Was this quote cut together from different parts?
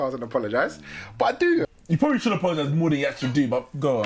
yes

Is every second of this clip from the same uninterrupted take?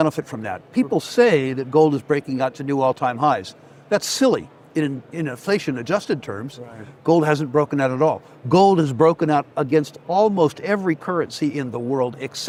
yes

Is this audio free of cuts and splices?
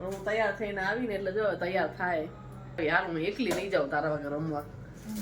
no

